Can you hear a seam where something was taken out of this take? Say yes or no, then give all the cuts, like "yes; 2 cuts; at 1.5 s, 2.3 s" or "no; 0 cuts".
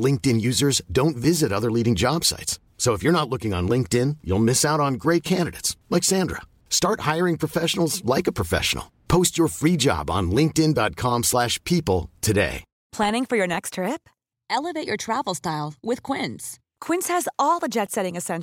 yes; 1 cut; at 12.8 s